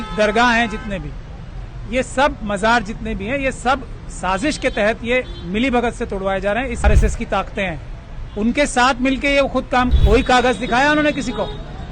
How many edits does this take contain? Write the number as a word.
two